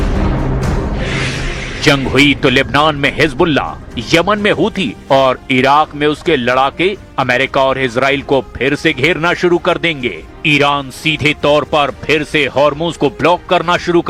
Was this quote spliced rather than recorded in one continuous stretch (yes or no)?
no